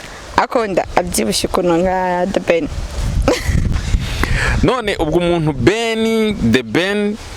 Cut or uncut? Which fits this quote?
uncut